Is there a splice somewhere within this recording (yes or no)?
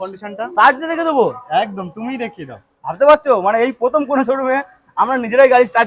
no